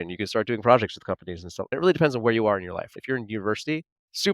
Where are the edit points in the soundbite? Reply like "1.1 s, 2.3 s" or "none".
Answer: 1.7 s, 2.9 s